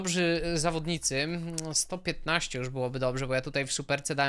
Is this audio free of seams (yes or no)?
yes